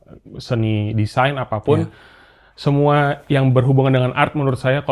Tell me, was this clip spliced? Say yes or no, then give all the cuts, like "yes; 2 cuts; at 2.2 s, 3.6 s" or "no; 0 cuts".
no; 0 cuts